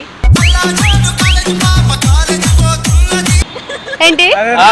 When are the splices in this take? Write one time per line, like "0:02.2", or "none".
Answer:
0:03.4